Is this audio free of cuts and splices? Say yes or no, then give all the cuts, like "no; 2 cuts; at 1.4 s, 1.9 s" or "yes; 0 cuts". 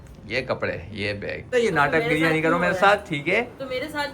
no; 1 cut; at 1.5 s